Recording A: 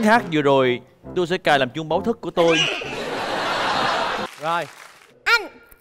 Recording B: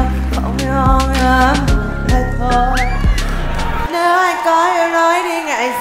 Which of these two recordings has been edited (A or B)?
A